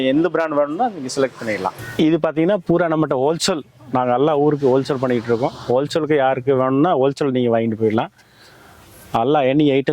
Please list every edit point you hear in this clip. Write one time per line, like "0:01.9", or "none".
0:01.8